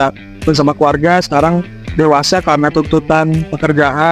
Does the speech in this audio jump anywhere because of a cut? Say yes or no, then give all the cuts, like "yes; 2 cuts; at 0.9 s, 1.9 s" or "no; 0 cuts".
no; 0 cuts